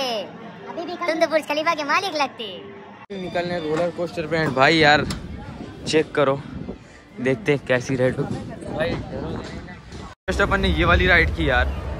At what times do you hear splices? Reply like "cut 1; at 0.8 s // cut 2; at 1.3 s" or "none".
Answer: cut 1; at 3.1 s // cut 2; at 10.3 s